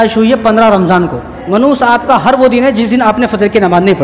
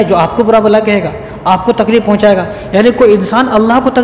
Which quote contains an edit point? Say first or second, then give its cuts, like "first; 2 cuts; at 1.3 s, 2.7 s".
first; 1 cut; at 1.4 s